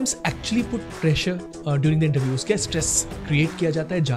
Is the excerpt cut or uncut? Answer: uncut